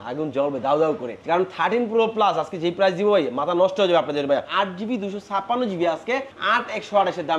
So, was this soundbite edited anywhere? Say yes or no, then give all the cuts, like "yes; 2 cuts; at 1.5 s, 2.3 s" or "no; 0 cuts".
yes; 3 cuts; at 1.1 s, 4.5 s, 6.3 s